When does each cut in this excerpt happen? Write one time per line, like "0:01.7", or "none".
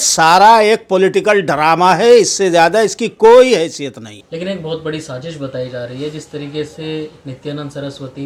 none